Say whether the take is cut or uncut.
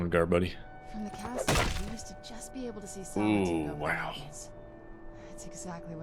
uncut